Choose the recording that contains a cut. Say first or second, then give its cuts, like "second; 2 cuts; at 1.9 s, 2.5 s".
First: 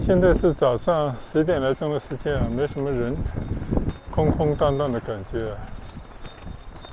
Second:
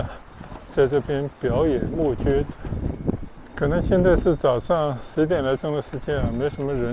second; 1 cut; at 2.9 s